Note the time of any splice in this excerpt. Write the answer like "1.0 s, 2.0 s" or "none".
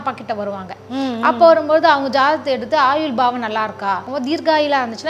4.1 s